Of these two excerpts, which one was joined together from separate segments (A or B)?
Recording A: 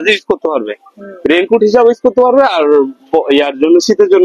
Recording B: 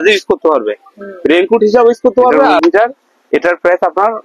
B